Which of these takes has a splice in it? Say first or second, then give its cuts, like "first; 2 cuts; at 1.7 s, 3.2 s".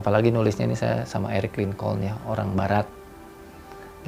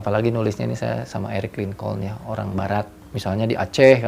second; 1 cut; at 3.0 s